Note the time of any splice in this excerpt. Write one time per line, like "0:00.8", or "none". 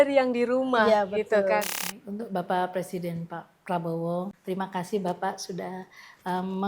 0:01.8
0:04.4